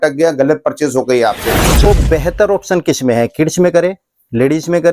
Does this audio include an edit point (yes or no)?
yes